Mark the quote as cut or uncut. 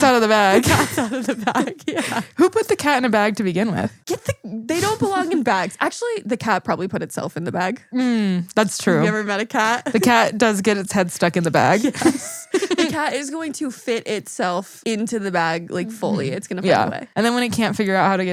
uncut